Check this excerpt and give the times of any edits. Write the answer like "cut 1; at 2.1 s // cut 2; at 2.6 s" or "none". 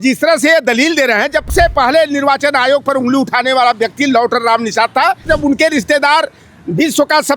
cut 1; at 1.5 s // cut 2; at 5.2 s